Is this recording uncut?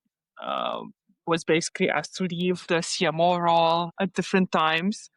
yes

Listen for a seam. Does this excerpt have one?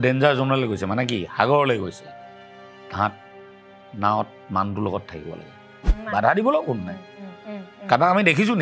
yes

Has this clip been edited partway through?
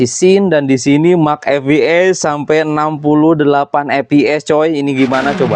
no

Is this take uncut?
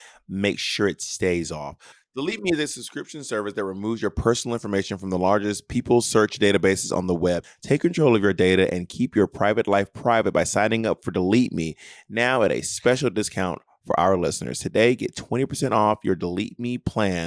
no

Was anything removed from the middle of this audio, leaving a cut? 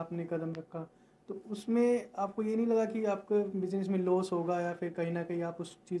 no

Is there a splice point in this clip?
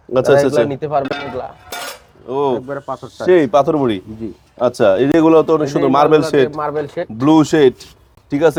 no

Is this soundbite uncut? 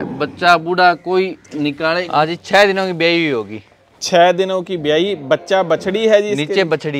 no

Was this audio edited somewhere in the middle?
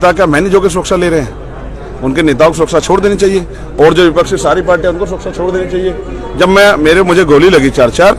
no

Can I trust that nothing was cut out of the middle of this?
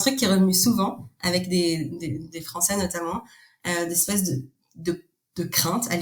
yes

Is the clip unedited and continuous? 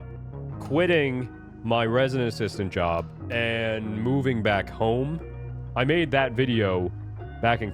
no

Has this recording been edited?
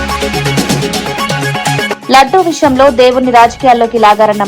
yes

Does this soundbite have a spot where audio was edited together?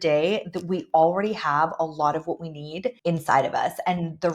yes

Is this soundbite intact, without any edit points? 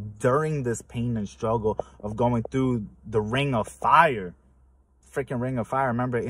yes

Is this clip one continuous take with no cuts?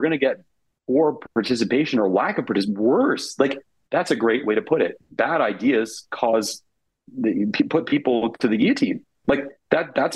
yes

